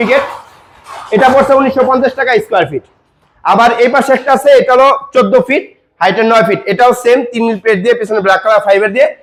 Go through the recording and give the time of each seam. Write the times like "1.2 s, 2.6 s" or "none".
none